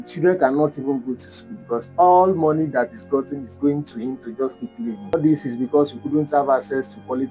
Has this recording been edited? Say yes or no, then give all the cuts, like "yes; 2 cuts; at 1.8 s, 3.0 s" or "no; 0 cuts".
yes; 1 cut; at 5.1 s